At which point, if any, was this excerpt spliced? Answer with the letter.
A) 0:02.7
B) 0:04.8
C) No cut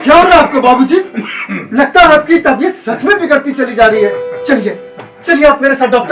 C